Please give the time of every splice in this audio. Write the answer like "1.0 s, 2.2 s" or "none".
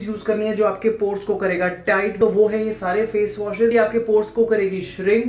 2.1 s, 3.7 s